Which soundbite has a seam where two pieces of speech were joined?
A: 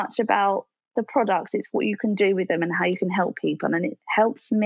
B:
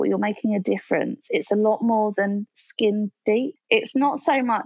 B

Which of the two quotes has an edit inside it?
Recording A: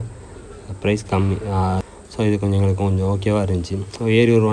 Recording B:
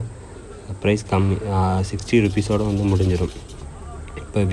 A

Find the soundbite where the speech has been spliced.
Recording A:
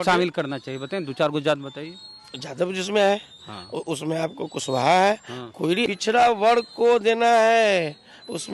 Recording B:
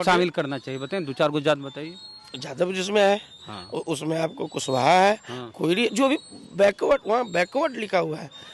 A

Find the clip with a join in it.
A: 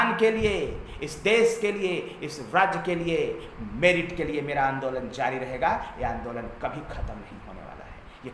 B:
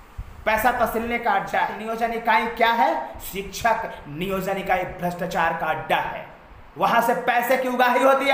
B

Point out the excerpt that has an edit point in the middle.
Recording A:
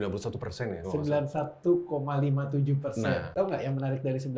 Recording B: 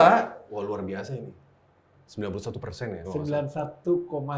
A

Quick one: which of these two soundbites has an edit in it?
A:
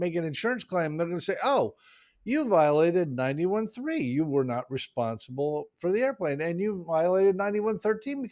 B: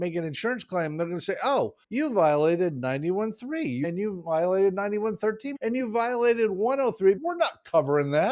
B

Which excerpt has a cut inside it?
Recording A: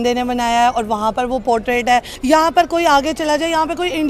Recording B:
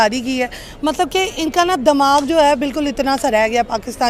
A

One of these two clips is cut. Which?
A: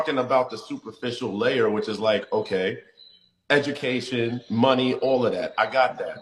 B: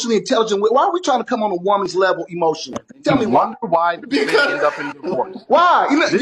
B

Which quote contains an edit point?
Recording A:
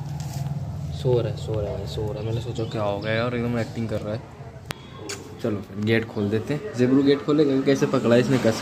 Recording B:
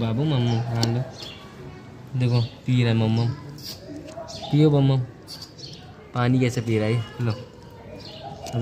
A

